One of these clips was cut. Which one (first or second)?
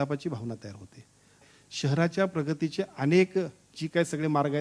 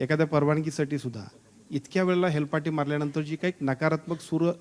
first